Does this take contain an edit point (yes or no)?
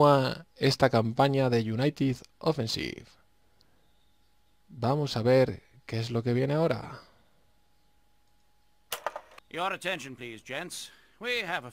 no